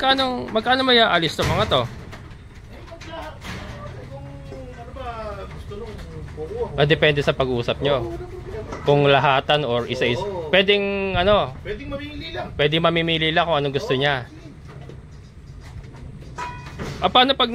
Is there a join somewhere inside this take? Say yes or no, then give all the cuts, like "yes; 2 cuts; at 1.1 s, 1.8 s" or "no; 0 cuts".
no; 0 cuts